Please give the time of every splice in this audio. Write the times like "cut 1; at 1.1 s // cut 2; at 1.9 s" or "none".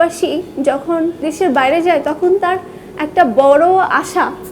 cut 1; at 1.2 s